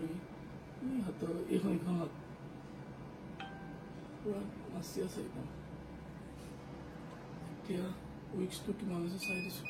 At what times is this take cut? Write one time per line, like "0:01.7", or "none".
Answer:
none